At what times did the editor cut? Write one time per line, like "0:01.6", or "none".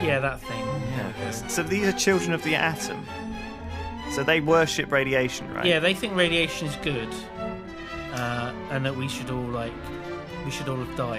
none